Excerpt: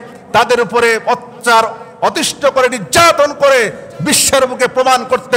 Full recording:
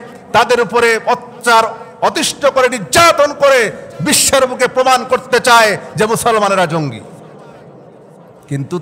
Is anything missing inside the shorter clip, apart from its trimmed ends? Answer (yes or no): no